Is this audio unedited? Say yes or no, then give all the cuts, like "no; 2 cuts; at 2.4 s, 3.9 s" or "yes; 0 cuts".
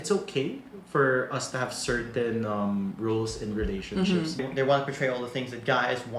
no; 1 cut; at 4.4 s